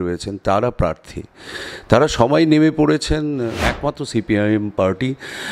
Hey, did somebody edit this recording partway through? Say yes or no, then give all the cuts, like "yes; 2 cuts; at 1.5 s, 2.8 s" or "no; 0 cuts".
yes; 1 cut; at 3.6 s